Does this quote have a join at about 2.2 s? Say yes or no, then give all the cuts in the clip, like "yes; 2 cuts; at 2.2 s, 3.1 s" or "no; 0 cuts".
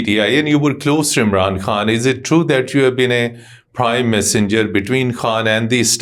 no; 0 cuts